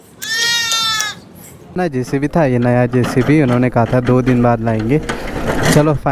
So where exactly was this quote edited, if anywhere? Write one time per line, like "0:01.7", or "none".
0:01.8